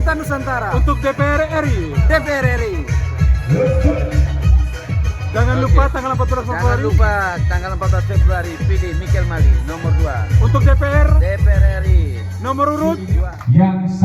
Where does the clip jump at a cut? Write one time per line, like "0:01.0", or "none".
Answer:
0:12.9